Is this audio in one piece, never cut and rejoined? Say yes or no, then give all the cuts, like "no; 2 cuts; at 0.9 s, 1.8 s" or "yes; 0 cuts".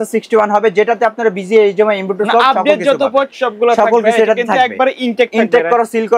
yes; 0 cuts